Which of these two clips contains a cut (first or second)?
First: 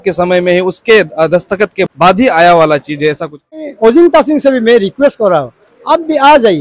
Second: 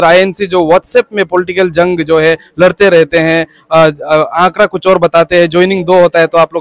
first